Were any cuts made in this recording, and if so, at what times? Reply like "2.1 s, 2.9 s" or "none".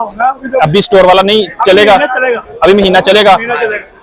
none